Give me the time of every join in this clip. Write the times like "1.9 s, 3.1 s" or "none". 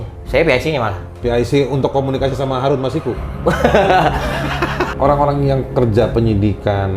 4.8 s